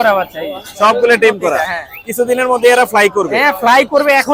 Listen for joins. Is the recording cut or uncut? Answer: uncut